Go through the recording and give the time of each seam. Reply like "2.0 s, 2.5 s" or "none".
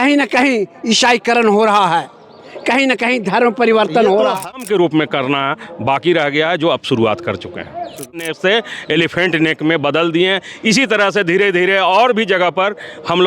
4.5 s, 8.3 s